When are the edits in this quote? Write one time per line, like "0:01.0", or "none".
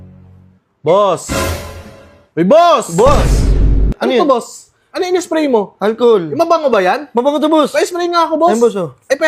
0:03.9